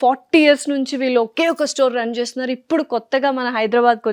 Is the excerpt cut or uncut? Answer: uncut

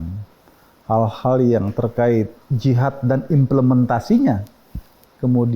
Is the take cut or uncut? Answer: cut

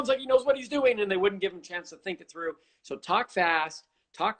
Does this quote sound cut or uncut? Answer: uncut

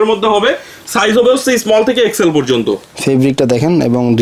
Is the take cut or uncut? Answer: uncut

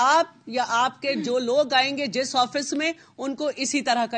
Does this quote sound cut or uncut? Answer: uncut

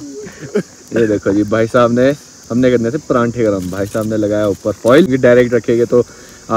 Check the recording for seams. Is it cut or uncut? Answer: uncut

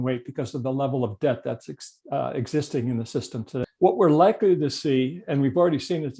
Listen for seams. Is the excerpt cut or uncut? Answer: cut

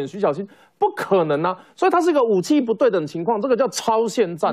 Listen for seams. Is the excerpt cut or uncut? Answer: uncut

